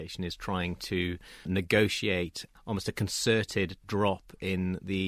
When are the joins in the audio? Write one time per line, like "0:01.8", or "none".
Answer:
0:02.5